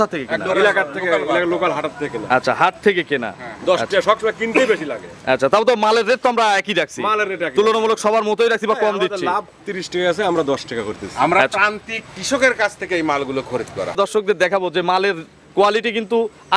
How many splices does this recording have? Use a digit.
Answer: 1